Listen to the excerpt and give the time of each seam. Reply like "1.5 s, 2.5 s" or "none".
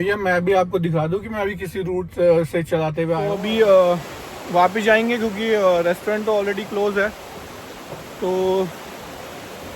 3.2 s